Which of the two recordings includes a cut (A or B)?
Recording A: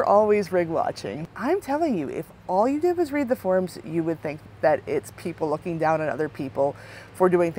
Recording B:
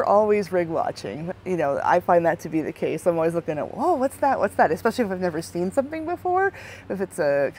A